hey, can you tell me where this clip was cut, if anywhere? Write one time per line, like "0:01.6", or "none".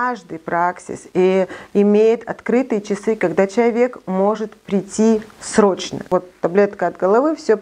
0:06.0